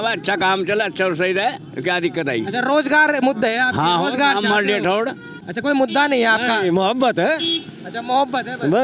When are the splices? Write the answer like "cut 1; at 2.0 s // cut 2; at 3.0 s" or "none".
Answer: cut 1; at 5.2 s